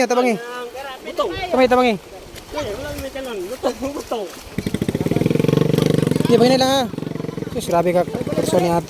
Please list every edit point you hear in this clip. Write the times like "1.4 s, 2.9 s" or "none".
4.5 s